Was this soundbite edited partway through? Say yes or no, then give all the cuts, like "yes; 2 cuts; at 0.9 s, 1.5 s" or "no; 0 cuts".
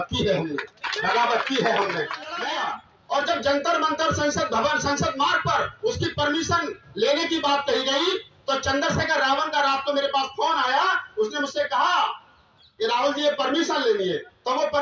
yes; 1 cut; at 2.4 s